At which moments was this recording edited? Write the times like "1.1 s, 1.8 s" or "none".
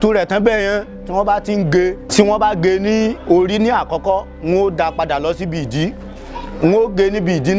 2.0 s